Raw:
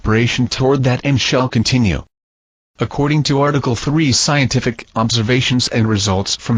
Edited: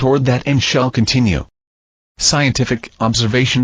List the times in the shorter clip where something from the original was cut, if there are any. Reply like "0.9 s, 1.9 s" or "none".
2.2 s